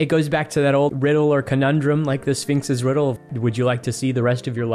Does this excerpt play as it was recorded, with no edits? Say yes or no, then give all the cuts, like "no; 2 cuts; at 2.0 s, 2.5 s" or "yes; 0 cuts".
no; 2 cuts; at 0.9 s, 3.2 s